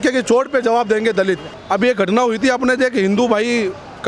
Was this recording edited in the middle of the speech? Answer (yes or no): yes